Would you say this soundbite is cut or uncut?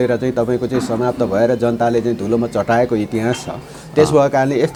uncut